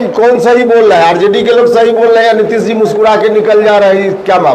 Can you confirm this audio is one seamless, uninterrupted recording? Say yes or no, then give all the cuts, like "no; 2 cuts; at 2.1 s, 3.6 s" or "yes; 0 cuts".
yes; 0 cuts